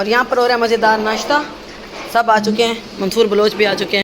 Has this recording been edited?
no; 0 cuts

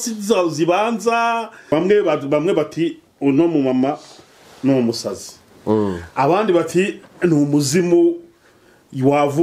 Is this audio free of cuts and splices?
no; 1 cut; at 1.6 s

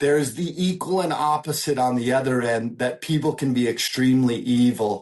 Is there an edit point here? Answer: no; 0 cuts

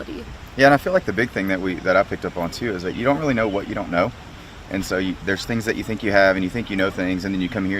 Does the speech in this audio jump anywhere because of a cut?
yes; 1 cut; at 6.9 s

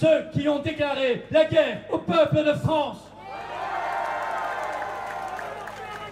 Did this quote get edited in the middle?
no; 0 cuts

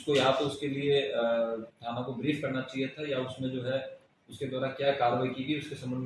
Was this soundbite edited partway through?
no; 0 cuts

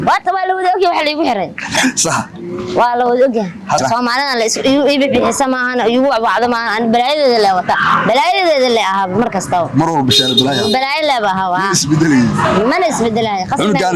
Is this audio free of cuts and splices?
no; 1 cut; at 3.8 s

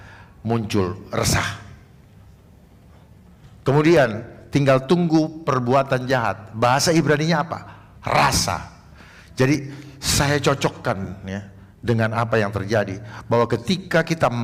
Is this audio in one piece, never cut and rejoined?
yes; 0 cuts

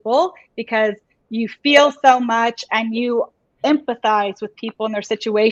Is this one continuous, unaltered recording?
yes; 0 cuts

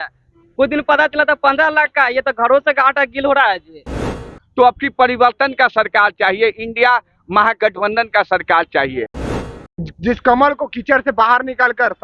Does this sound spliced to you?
yes; 2 cuts; at 4.2 s, 9.1 s

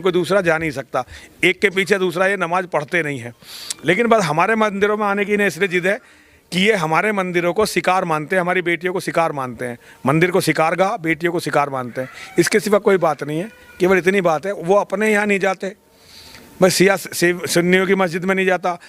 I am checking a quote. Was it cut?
no; 0 cuts

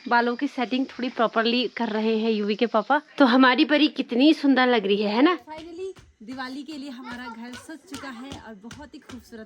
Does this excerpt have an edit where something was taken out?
yes; 2 cuts; at 3.1 s, 5.5 s

